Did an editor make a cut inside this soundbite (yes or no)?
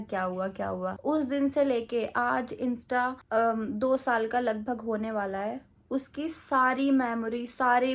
yes